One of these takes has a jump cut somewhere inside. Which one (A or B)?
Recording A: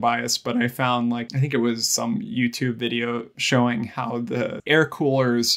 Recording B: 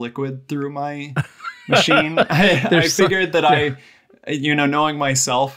A